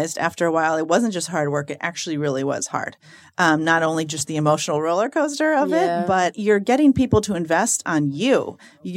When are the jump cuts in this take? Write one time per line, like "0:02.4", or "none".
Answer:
0:06.4